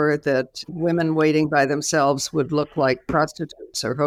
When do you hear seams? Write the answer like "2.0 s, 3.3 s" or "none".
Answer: none